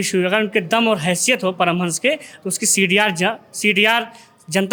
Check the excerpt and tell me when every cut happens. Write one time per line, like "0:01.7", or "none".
none